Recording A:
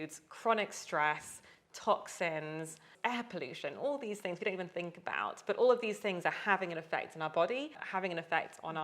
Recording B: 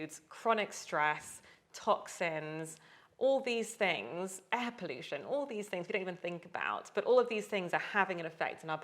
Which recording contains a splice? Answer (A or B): A